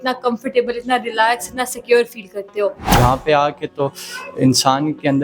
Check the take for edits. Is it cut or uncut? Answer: cut